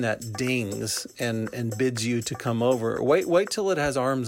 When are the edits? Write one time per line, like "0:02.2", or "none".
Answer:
none